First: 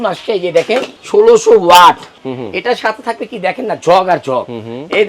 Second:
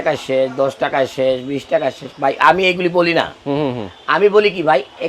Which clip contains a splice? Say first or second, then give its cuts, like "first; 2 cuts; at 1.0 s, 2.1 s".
first; 2 cuts; at 0.9 s, 2.2 s